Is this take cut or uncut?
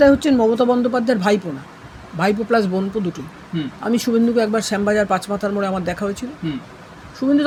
uncut